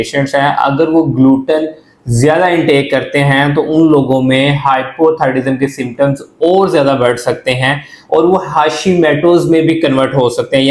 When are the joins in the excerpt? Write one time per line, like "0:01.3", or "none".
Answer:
none